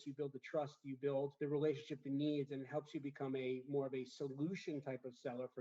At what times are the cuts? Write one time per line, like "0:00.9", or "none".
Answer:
0:01.3